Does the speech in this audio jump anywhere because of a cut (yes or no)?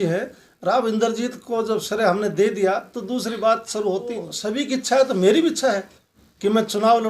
yes